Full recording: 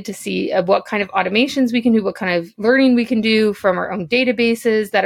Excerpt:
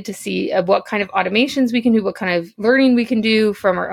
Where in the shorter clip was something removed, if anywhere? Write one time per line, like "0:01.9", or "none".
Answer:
none